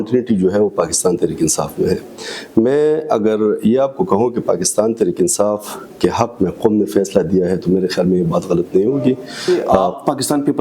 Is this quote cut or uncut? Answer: cut